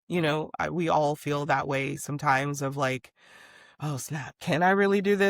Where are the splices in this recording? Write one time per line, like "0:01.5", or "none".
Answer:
0:04.4